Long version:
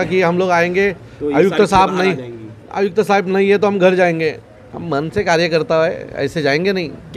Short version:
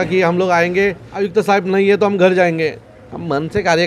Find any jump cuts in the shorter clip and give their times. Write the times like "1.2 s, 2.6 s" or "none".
1.1 s